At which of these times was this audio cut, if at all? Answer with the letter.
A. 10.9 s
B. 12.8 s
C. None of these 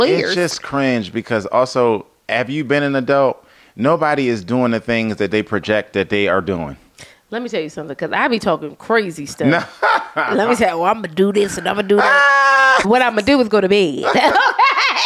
B